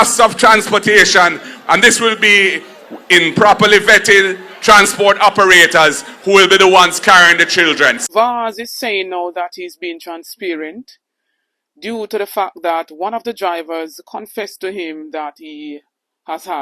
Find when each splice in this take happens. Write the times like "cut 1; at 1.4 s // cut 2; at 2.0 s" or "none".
cut 1; at 8.0 s